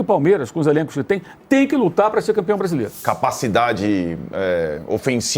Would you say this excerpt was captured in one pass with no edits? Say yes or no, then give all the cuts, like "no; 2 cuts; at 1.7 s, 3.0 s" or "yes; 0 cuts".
no; 1 cut; at 2.9 s